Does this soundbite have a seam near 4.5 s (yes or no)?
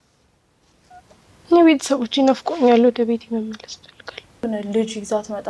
yes